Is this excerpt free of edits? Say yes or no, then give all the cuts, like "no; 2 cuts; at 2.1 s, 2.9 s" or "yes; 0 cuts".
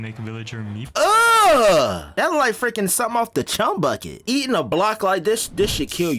no; 2 cuts; at 2.1 s, 4.1 s